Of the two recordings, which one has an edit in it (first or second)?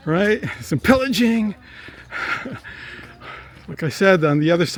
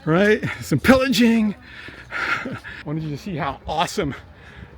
second